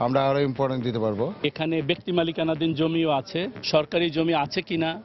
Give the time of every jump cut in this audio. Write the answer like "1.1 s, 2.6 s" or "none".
1.4 s

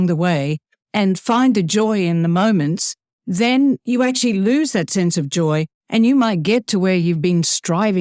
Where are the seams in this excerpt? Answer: none

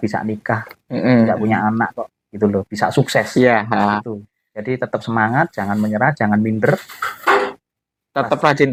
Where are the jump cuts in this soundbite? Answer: none

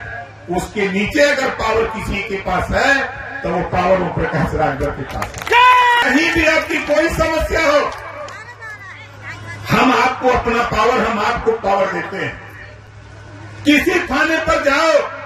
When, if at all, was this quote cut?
6.0 s

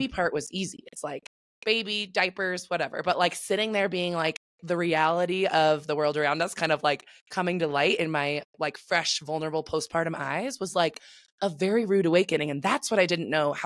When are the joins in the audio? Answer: none

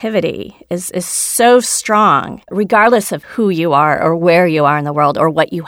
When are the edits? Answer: 2.5 s, 3.2 s

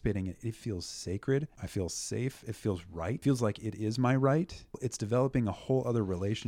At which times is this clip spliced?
1.6 s, 3.2 s, 4.9 s

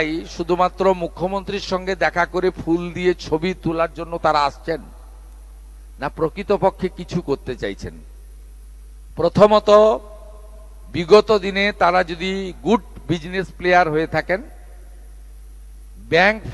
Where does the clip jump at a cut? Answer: none

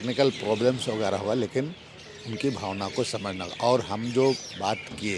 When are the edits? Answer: none

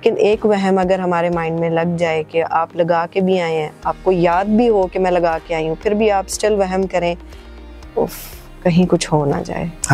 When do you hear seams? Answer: none

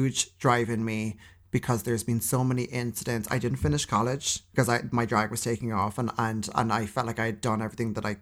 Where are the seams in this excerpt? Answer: 4.4 s

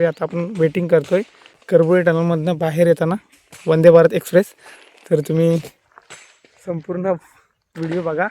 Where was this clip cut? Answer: 1.7 s

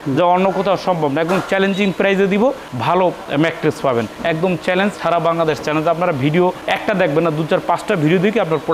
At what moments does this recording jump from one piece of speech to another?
none

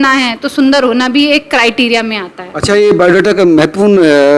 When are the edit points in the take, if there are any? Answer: none

